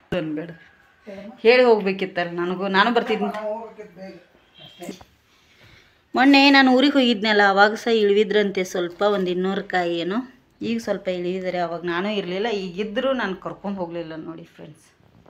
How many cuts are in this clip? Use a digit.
1